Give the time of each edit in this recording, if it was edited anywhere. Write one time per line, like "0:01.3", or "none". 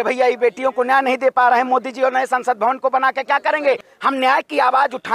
0:03.9